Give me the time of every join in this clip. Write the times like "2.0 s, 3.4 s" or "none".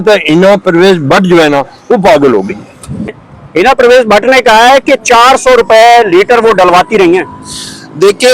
3.1 s

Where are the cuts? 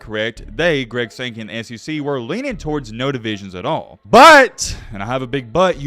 3.9 s

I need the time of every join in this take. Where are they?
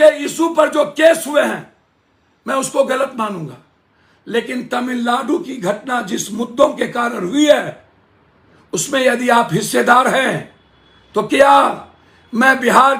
none

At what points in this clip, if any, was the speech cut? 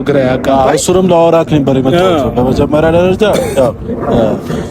none

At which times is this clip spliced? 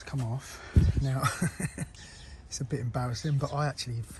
none

